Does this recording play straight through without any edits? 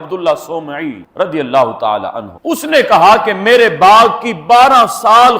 no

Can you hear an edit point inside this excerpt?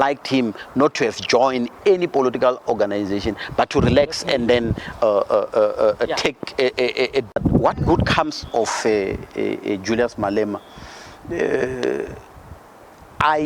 yes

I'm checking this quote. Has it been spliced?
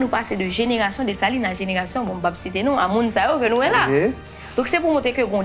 no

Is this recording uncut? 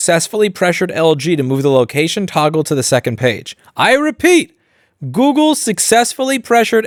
yes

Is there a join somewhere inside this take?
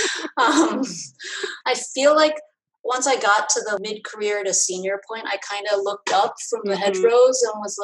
yes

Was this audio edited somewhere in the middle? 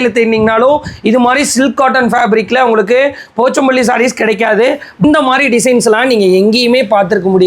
yes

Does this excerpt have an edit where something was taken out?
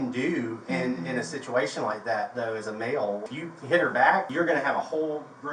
yes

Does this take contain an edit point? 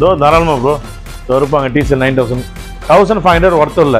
yes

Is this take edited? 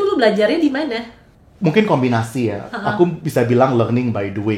no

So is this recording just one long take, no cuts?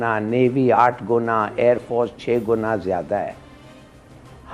yes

